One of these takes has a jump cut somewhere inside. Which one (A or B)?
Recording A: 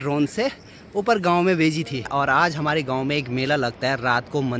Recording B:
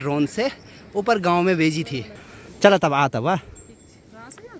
A